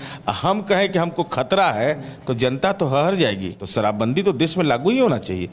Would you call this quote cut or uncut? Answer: cut